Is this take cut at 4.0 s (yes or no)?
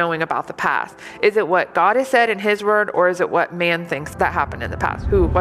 yes